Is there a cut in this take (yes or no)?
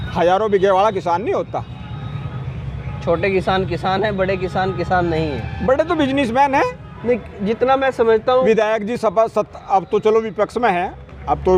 yes